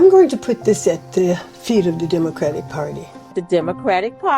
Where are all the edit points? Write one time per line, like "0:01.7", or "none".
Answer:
0:03.3